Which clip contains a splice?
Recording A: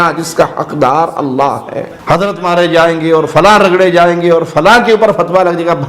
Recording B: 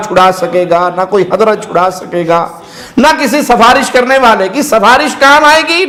A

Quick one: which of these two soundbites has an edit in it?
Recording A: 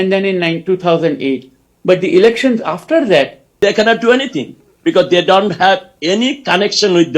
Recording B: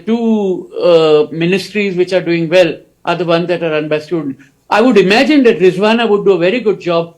A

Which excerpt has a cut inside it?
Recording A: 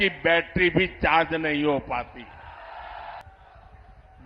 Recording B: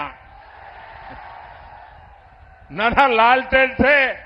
A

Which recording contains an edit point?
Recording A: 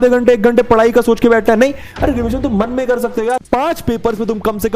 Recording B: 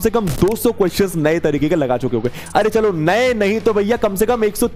A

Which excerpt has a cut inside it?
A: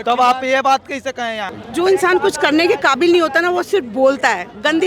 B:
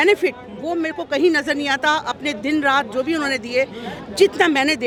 A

